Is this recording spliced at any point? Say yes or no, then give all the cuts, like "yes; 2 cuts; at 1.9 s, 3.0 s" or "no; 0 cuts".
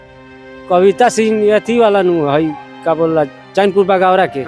no; 0 cuts